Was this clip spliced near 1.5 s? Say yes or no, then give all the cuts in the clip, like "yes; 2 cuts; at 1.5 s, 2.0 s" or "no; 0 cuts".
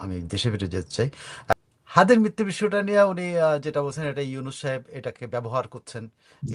yes; 1 cut; at 1.5 s